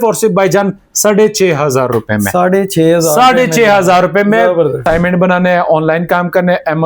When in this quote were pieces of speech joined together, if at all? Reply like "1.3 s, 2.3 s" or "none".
4.8 s